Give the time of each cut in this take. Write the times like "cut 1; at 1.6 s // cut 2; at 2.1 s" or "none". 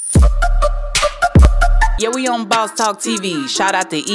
none